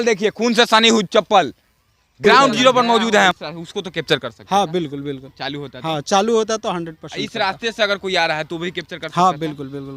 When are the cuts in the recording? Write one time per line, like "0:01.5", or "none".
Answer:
0:03.3